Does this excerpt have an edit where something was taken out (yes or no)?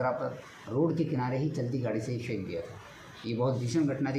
no